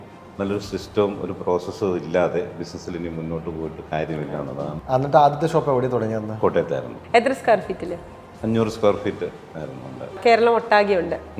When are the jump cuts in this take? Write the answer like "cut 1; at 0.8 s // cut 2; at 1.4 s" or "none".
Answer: cut 1; at 4.8 s // cut 2; at 6.9 s // cut 3; at 10.2 s